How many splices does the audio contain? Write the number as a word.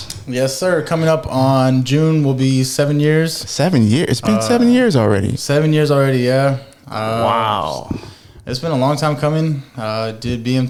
zero